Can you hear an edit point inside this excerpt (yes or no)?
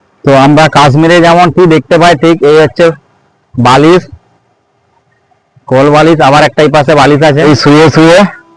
yes